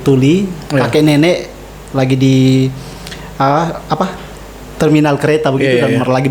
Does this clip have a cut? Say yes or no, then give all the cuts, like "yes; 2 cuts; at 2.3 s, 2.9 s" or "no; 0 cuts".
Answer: no; 0 cuts